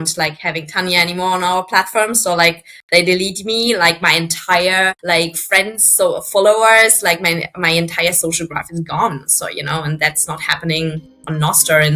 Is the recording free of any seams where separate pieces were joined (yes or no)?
yes